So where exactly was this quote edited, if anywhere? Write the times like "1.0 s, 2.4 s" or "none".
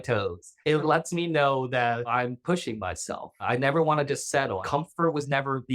0.8 s, 2.1 s, 3.4 s, 4.6 s